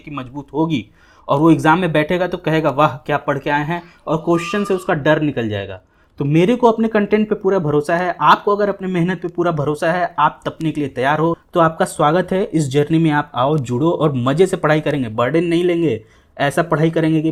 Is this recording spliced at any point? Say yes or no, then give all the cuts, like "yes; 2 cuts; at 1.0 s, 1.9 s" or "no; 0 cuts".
no; 0 cuts